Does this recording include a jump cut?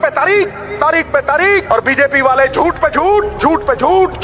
yes; 1 cut; at 1.6 s

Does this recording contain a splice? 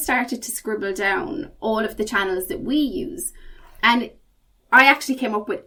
no; 0 cuts

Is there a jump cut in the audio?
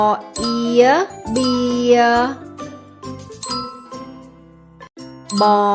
no; 0 cuts

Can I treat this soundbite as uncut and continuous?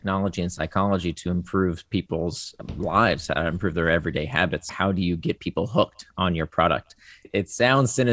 no; 3 cuts; at 2.6 s, 4.7 s, 7.3 s

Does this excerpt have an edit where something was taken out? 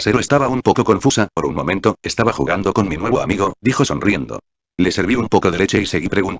no; 0 cuts

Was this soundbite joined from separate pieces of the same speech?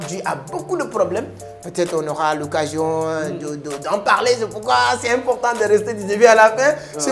no; 0 cuts

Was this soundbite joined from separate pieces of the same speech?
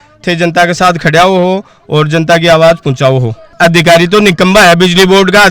yes; 1 cut; at 3.5 s

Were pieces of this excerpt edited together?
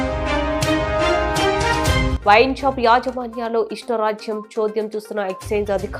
yes; 1 cut; at 2.1 s

